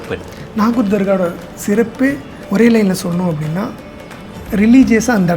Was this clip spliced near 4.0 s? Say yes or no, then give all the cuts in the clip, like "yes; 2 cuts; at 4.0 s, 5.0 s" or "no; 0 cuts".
no; 1 cut; at 2.3 s